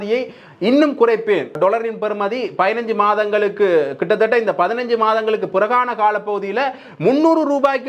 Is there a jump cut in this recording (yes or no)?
yes